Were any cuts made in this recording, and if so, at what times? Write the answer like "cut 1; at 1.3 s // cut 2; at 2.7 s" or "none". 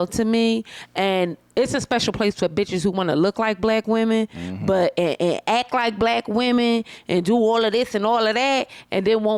none